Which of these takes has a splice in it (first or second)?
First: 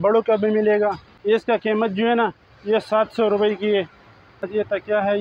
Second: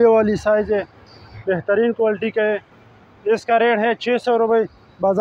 first